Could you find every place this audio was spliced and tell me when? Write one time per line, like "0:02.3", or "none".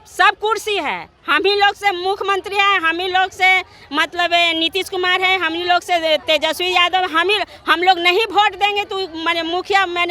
none